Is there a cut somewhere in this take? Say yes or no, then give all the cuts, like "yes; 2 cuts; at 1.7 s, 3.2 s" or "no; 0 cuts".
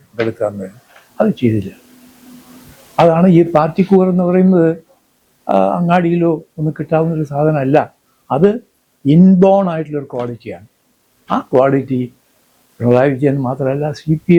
no; 0 cuts